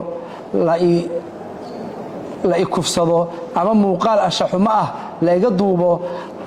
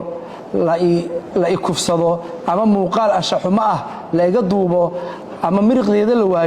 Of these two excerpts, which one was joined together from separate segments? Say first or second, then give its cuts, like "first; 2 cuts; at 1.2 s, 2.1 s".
second; 1 cut; at 1.3 s